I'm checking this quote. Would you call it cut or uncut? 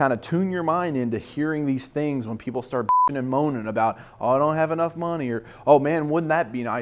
uncut